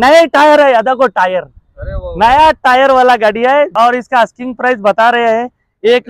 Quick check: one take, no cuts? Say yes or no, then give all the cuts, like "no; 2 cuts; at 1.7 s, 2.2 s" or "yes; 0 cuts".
no; 1 cut; at 3.7 s